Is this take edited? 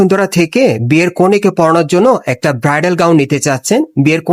no; 0 cuts

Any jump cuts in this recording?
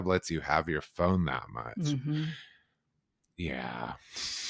no; 0 cuts

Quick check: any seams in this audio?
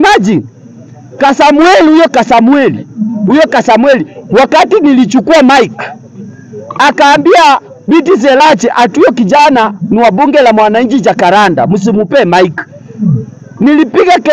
no; 0 cuts

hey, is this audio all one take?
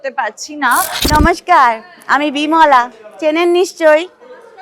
no; 1 cut; at 1.0 s

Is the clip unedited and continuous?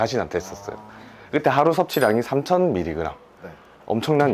yes; 0 cuts

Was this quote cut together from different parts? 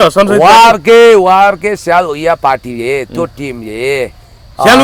no; 0 cuts

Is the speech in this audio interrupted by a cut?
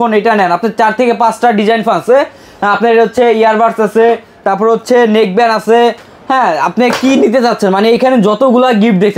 no; 0 cuts

